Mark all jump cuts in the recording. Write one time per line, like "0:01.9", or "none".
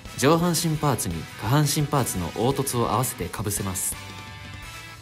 0:03.8